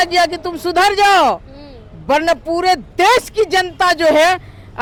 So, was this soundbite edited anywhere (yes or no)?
no